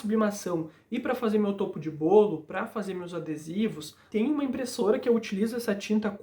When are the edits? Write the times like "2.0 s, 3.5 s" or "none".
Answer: 4.1 s

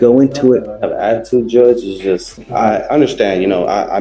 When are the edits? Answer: 2.4 s

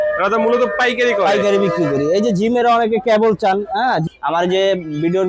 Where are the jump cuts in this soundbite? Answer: 4.1 s

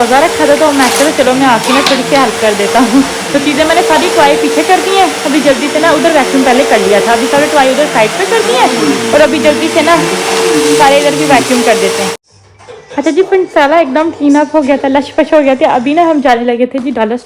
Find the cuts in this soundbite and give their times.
none

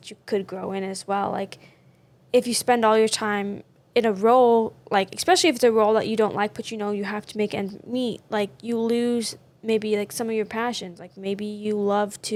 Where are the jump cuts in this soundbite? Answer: none

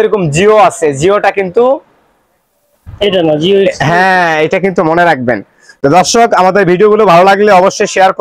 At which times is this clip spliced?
none

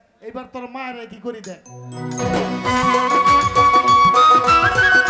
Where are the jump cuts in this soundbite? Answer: 2.2 s

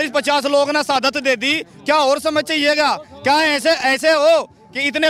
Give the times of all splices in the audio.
none

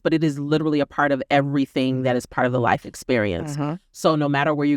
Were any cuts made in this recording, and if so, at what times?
none

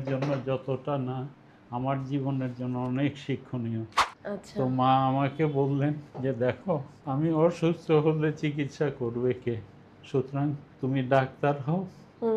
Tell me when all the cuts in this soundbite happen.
4.1 s, 6.1 s, 6.9 s, 10.7 s

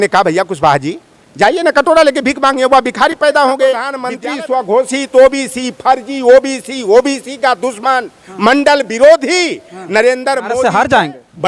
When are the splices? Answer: 4.0 s, 10.5 s

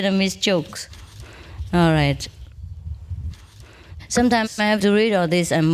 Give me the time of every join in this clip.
none

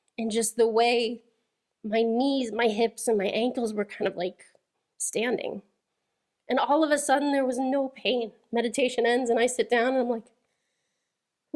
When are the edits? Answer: 8.4 s

